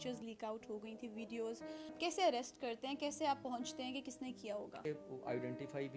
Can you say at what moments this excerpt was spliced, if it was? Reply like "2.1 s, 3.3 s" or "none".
2.0 s, 4.8 s